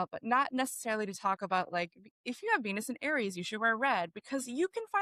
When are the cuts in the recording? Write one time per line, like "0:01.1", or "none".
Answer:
none